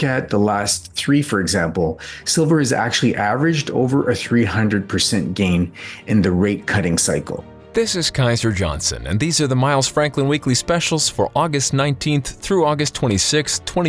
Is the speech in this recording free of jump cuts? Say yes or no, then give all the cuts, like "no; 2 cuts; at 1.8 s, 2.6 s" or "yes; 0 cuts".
no; 1 cut; at 7.5 s